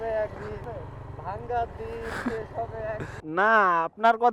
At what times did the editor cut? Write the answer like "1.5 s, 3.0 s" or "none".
3.1 s